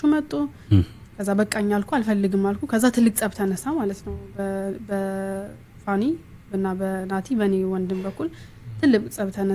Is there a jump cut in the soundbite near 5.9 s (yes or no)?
no